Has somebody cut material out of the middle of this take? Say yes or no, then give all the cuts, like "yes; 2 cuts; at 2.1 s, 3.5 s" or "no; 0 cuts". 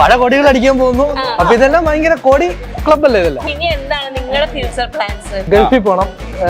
yes; 2 cuts; at 3.5 s, 5.5 s